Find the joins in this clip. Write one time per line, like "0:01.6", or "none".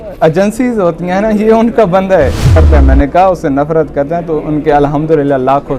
0:02.5